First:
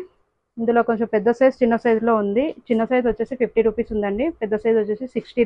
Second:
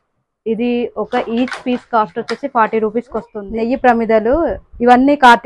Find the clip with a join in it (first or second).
second